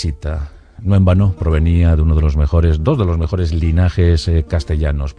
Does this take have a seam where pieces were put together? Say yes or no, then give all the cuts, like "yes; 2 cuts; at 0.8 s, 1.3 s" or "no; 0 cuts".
yes; 1 cut; at 1.7 s